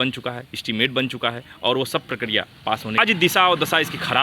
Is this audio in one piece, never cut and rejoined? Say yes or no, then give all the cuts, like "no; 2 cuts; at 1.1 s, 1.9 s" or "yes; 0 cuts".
no; 1 cut; at 3.0 s